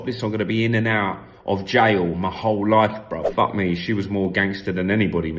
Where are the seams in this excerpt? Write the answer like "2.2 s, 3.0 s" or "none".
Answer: 3.3 s

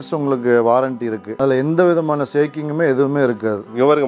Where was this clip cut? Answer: 1.3 s

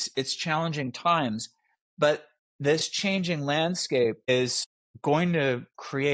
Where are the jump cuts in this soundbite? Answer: none

